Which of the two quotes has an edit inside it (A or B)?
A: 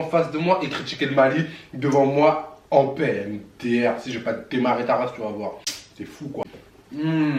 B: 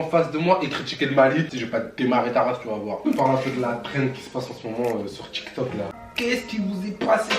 B